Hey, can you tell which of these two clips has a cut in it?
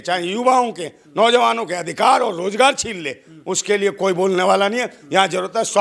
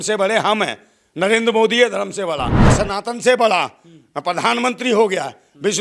second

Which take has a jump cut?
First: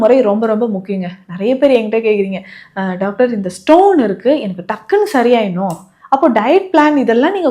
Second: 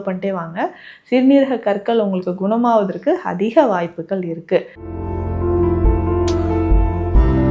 second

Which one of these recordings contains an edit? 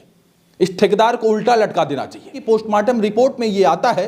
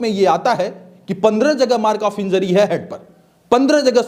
first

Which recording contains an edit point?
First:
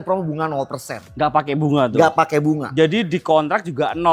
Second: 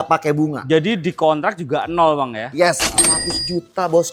second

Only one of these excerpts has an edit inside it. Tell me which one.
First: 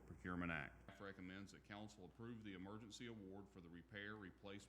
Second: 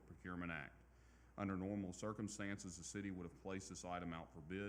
first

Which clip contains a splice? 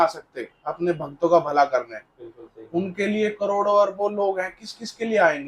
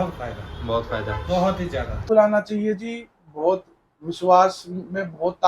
second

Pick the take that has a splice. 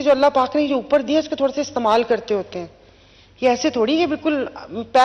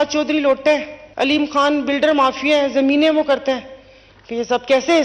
second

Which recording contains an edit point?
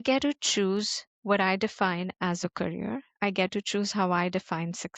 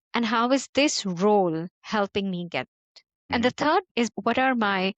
second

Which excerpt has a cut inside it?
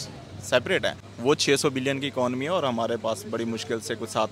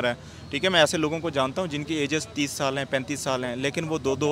first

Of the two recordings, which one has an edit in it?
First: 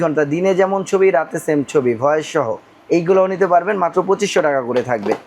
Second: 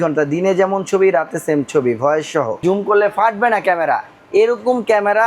second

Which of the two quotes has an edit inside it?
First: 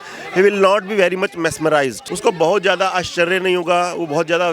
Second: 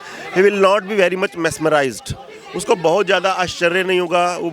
first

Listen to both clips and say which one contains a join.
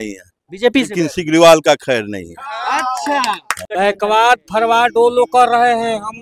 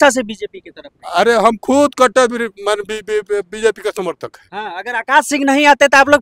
first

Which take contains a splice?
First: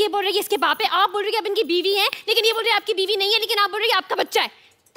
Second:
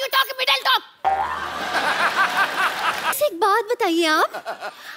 second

